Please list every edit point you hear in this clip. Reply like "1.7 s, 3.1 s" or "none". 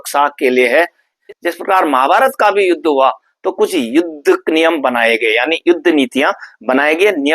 1.1 s